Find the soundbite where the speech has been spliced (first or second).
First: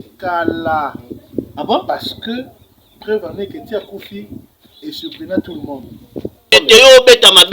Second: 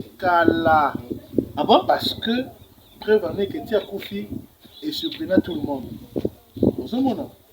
first